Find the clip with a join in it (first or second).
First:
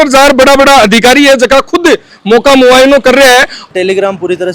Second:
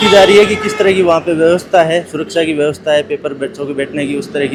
first